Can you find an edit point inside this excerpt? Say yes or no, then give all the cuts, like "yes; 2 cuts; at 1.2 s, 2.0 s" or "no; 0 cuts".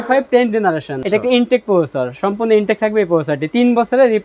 yes; 1 cut; at 0.9 s